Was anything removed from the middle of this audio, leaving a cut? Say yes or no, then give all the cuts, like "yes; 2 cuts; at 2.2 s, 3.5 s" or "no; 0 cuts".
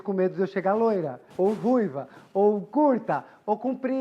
yes; 1 cut; at 1.2 s